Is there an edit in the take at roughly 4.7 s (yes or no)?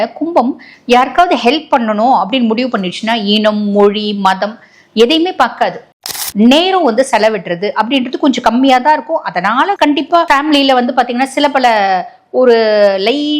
no